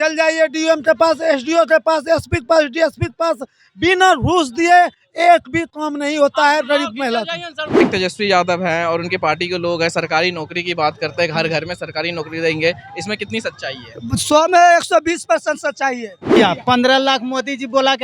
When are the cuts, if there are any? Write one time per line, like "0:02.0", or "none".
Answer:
0:07.7
0:16.4